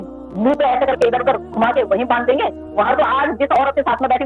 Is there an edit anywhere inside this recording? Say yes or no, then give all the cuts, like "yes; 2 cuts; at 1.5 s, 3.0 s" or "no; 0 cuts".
yes; 1 cut; at 2.9 s